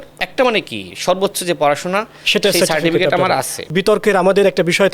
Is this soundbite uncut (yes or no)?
no